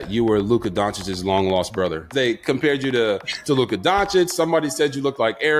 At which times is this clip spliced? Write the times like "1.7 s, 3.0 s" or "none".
2.1 s